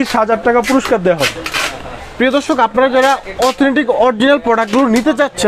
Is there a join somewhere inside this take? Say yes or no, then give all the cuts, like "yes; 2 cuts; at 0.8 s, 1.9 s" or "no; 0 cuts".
no; 0 cuts